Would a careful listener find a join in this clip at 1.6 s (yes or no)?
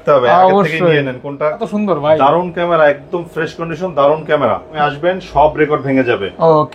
yes